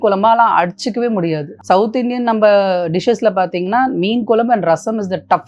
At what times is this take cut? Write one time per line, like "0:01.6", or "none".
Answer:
0:01.5